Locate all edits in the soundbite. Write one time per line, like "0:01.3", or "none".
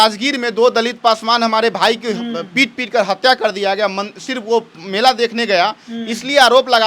none